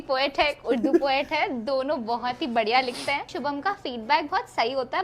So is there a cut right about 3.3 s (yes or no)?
yes